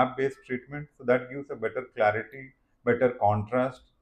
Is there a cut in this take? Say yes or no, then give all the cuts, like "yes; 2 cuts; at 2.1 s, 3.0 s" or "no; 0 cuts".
no; 0 cuts